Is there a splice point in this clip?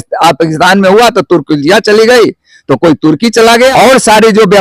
yes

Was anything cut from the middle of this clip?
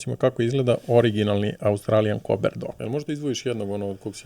yes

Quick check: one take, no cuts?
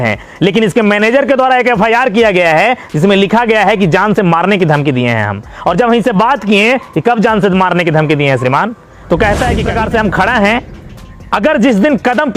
no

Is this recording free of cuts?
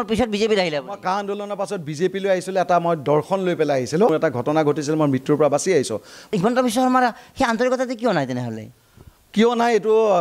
no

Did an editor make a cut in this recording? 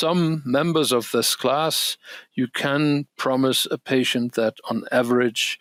no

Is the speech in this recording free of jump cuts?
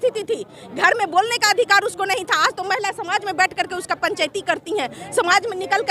yes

